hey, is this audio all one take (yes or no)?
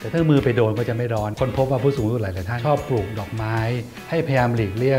no